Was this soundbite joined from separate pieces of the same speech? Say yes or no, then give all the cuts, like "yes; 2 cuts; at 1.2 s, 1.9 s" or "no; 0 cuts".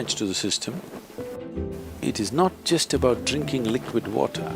yes; 1 cut; at 1.4 s